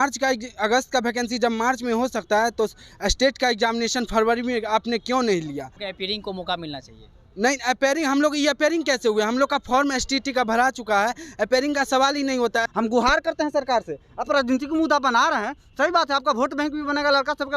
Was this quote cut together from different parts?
yes; 2 cuts; at 5.8 s, 12.7 s

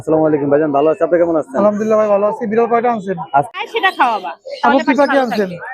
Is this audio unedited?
no; 1 cut; at 3.5 s

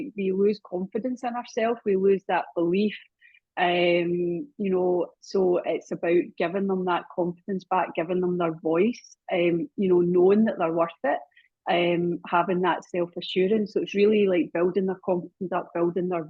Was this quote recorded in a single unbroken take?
yes; 0 cuts

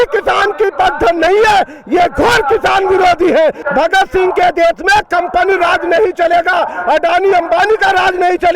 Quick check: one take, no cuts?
no; 1 cut; at 3.6 s

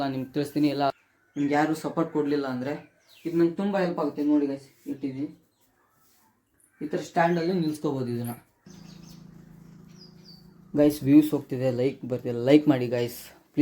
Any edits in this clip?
yes; 2 cuts; at 0.9 s, 8.7 s

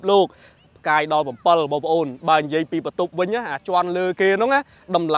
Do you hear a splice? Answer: no; 0 cuts

